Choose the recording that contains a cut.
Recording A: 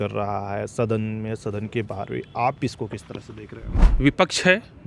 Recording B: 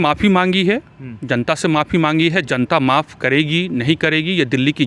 A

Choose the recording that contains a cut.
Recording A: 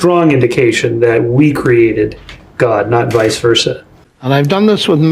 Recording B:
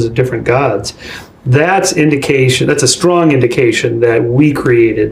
A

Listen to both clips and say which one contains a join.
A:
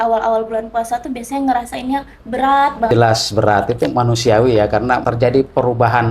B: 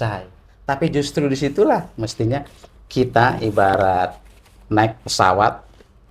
A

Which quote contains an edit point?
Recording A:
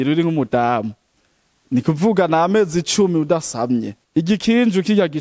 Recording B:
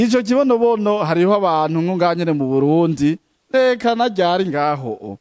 A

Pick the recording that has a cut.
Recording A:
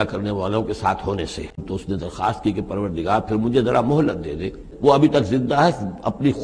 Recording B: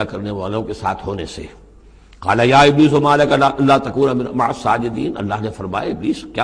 A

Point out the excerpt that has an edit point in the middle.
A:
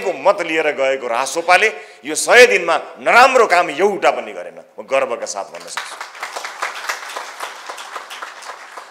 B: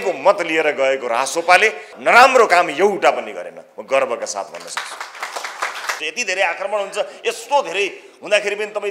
B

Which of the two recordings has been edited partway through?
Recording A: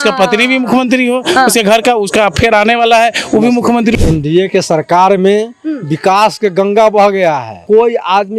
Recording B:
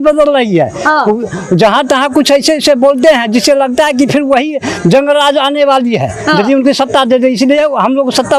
A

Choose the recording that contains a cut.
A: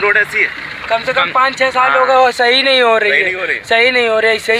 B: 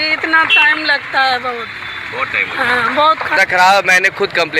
B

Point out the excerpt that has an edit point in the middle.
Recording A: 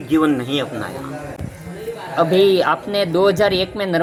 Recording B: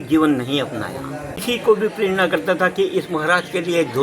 B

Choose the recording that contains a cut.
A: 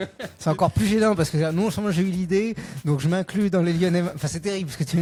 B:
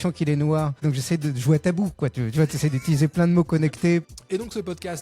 B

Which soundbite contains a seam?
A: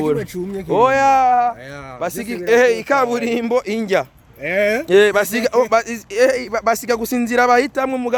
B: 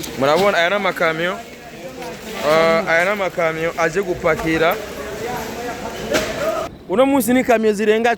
B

